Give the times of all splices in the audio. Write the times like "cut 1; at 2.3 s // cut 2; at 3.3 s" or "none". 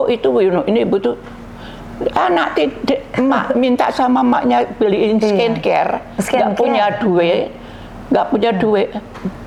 none